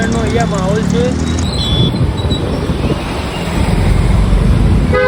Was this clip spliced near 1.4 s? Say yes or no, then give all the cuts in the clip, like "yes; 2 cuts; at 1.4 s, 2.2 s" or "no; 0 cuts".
no; 0 cuts